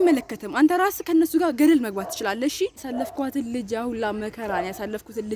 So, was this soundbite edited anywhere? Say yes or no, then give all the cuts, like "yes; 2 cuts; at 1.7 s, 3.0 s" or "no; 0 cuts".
yes; 1 cut; at 2.9 s